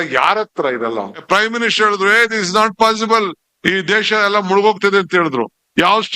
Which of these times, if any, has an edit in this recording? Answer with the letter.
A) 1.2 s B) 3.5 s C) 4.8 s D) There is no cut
A